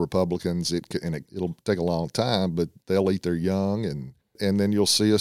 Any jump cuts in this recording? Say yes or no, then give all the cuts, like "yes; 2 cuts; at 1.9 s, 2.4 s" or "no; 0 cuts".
yes; 3 cuts; at 1.2 s, 2.8 s, 4.4 s